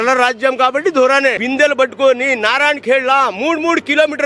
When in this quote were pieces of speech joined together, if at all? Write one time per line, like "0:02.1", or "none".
0:01.4